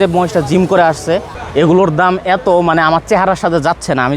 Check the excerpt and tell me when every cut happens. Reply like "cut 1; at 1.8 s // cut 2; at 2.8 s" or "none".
cut 1; at 1.4 s